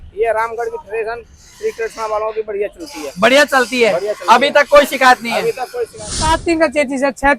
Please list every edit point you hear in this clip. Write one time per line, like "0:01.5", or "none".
0:06.4